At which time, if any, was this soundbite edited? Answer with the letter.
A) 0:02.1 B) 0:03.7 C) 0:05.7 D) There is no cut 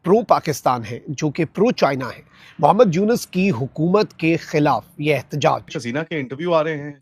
C